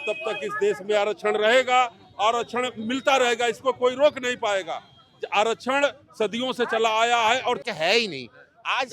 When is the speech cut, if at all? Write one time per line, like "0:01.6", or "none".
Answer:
0:07.6

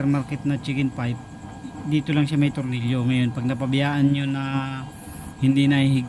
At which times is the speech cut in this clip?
none

